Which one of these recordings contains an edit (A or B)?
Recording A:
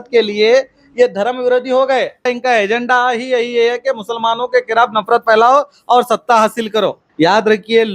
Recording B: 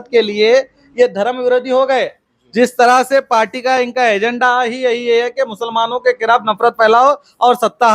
A